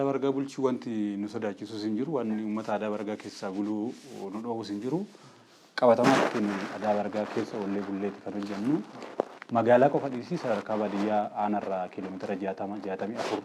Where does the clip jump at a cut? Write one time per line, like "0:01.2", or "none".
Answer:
none

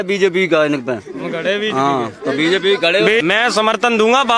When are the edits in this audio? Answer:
0:03.2

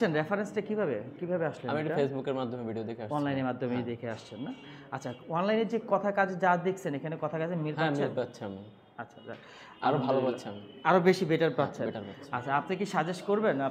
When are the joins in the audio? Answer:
none

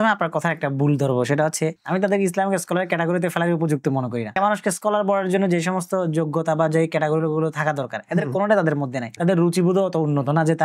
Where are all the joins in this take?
0:01.8

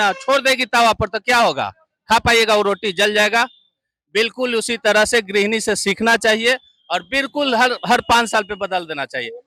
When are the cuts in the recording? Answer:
none

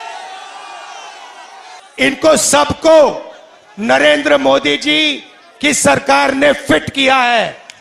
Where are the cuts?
0:01.8

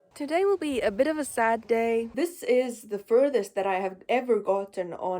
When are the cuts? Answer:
0:02.1

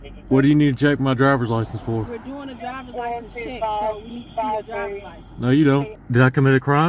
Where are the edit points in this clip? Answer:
0:06.0

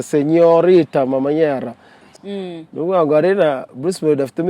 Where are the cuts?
0:02.0

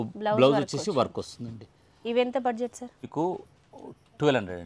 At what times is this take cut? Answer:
0:03.1

